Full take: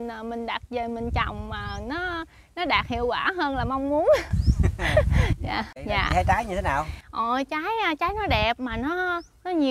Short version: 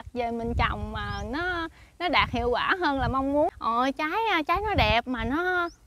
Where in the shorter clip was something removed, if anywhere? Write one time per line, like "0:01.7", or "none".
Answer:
0:03.5